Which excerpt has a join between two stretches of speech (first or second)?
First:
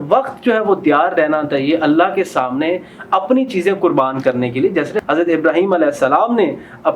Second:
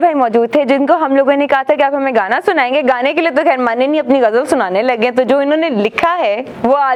first